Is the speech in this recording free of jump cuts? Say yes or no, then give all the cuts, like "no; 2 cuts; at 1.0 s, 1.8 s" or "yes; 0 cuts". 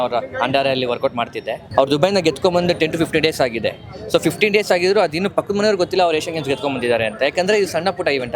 no; 1 cut; at 1.6 s